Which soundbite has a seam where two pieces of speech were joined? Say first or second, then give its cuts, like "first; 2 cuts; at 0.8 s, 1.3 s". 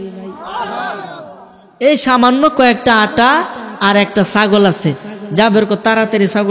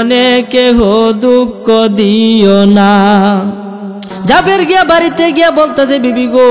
second; 1 cut; at 4.1 s